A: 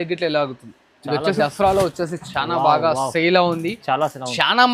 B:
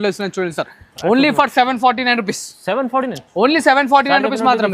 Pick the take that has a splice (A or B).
A